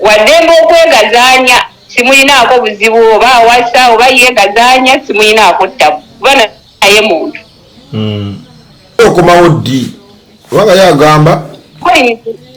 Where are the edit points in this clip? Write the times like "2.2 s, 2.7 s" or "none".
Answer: none